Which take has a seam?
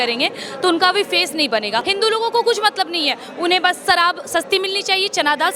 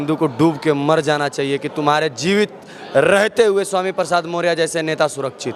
first; 1 cut; at 1.9 s

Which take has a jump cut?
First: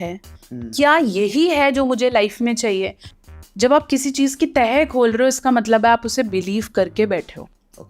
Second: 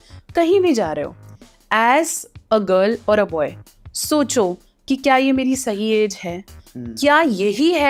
first; 1 cut; at 3.1 s

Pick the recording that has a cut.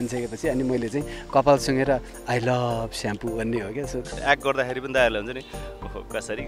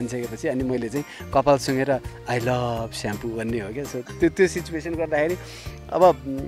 first; 1 cut; at 4.2 s

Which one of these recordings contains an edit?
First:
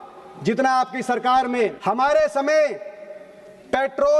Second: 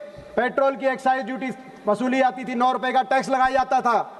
first; 1 cut; at 1.8 s

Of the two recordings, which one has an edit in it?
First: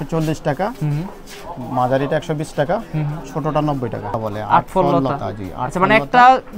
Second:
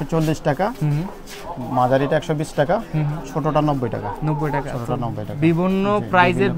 first; 1 cut; at 4.2 s

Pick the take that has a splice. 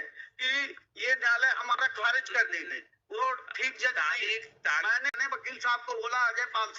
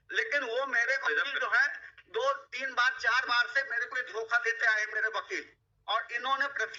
first; 1 cut; at 5.1 s

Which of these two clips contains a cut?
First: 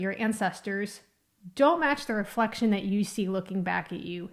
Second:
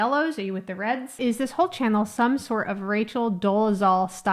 second; 1 cut; at 1.2 s

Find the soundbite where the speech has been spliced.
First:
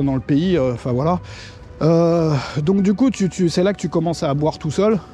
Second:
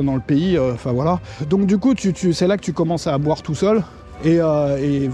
second; 2 cuts; at 1.3 s, 4.0 s

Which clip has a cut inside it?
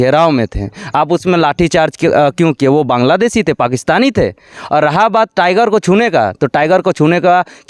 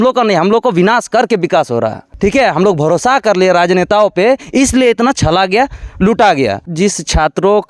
second; 2 cuts; at 2.0 s, 6.7 s

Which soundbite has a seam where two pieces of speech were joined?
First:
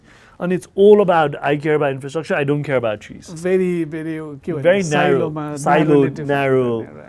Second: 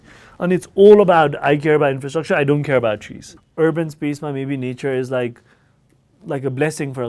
second; 1 cut; at 3.2 s

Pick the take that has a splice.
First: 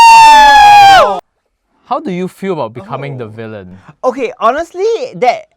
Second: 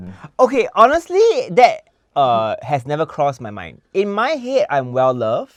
first; 1 cut; at 1.2 s

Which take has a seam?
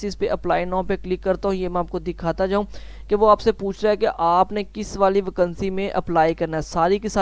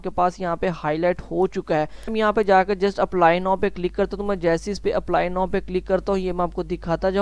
second; 1 cut; at 2.1 s

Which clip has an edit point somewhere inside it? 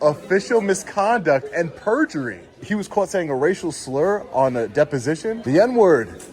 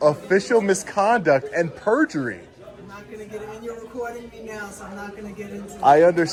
first; 2 cuts; at 2.6 s, 5.4 s

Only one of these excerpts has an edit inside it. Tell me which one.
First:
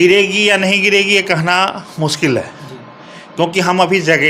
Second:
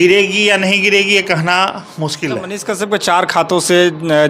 second; 1 cut; at 2.5 s

